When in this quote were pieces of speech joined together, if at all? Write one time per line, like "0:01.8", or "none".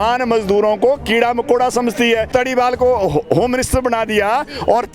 0:02.3